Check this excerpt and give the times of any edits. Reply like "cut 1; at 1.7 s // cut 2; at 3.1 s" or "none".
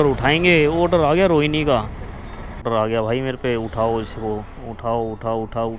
cut 1; at 2.7 s